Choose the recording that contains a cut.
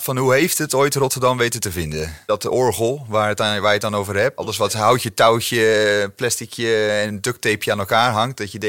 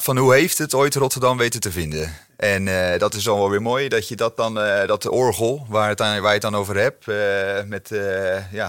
first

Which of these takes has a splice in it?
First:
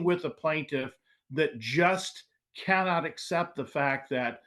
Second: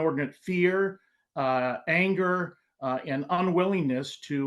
second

